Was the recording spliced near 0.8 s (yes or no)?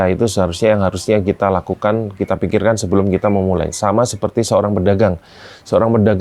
no